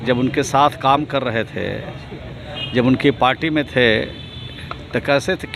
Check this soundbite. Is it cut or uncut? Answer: uncut